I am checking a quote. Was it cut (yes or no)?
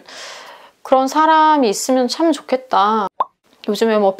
yes